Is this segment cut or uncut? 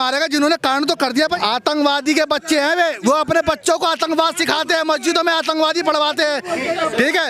cut